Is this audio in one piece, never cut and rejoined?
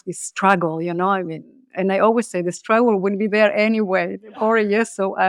yes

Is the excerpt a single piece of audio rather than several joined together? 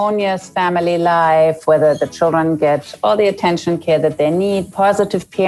yes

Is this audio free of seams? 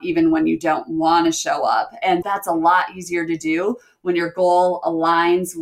no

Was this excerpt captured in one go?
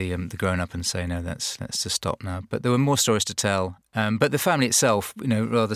yes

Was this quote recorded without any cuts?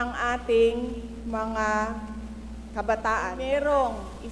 no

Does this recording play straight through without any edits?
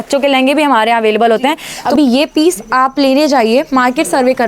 no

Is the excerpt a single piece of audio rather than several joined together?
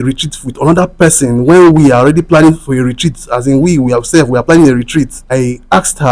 no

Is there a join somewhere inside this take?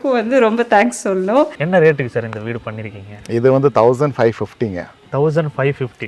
yes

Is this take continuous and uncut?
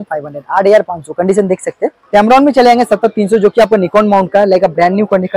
no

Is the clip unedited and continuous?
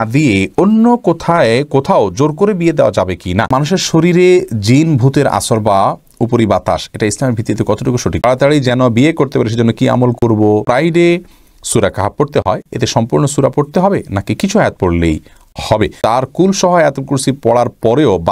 no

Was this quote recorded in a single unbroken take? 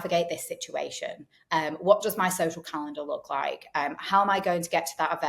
yes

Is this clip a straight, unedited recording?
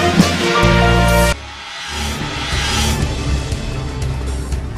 yes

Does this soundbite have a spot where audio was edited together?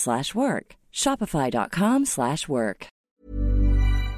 yes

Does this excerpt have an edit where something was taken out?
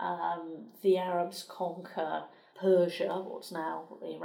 yes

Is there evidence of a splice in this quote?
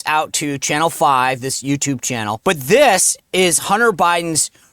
yes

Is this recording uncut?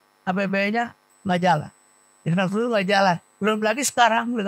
no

